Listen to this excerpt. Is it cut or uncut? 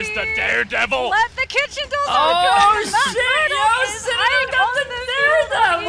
uncut